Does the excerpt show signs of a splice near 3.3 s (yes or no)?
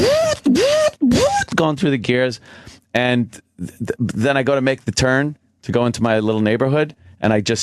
yes